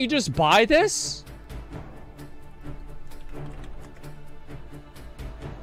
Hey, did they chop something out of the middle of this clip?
no; 0 cuts

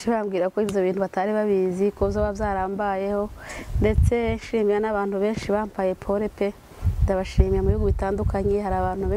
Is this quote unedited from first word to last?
yes; 0 cuts

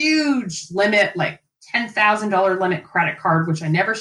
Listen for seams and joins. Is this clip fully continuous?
yes; 0 cuts

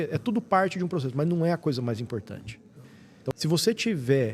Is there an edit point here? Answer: yes; 1 cut; at 3.3 s

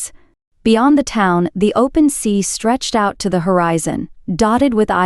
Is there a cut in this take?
no; 0 cuts

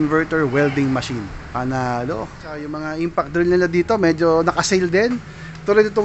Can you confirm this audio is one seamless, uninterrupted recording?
yes; 0 cuts

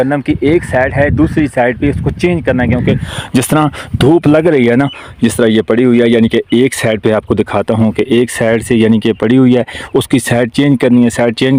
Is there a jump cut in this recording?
no; 0 cuts

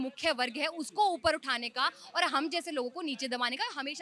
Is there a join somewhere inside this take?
no; 0 cuts

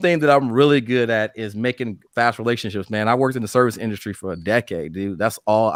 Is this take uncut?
yes; 0 cuts

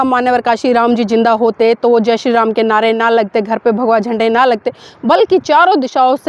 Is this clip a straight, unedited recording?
yes; 0 cuts

